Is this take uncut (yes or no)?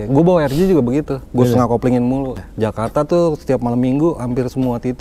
no